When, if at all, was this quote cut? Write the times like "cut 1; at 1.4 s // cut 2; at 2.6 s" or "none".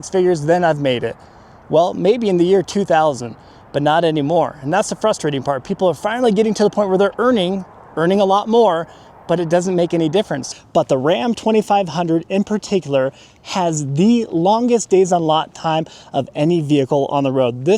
cut 1; at 10.4 s